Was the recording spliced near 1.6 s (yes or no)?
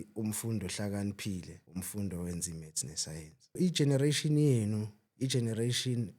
yes